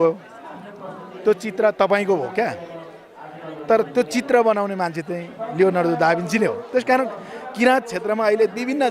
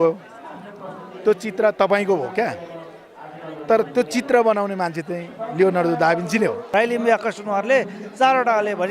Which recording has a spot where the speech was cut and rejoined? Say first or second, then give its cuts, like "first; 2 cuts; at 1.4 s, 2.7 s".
second; 1 cut; at 6.6 s